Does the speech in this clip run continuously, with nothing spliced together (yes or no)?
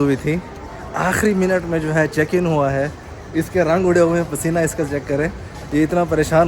yes